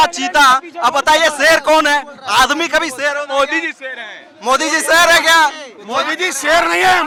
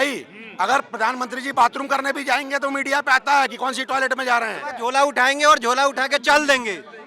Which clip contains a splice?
second; 1 cut; at 4.7 s

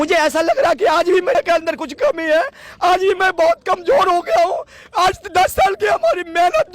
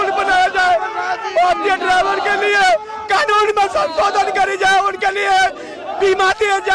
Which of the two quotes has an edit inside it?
first; 1 cut; at 1.4 s

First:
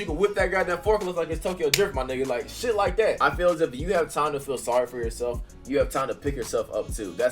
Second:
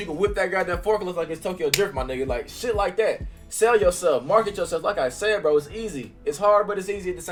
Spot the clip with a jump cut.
first; 1 cut; at 3.2 s

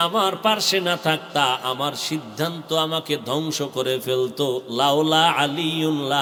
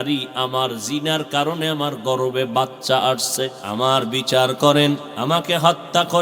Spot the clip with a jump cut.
second; 2 cuts; at 3.6 s, 5.1 s

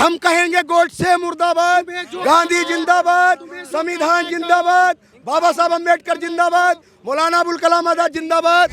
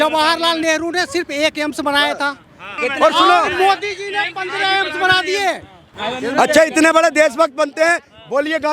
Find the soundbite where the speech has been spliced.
second; 2 cuts; at 2.6 s, 5.9 s

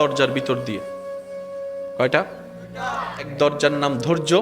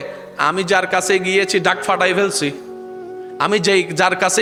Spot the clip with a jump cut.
first; 1 cut; at 3.3 s

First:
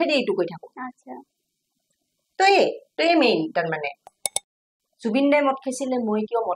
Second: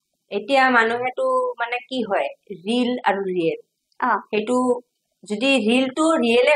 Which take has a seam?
first; 1 cut; at 4.4 s

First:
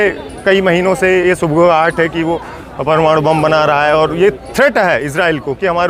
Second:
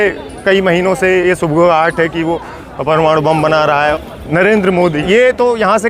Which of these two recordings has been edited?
second; 2 cuts; at 3.9 s, 5.0 s

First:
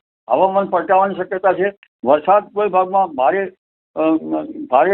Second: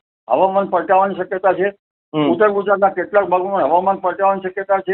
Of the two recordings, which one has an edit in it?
first; 1 cut; at 1.9 s

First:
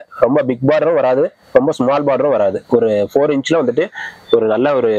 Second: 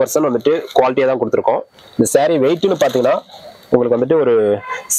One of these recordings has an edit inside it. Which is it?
second; 1 cut; at 1.8 s

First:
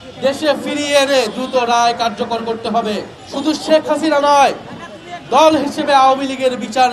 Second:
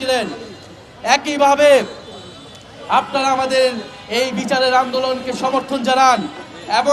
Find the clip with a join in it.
first; 1 cut; at 3.2 s

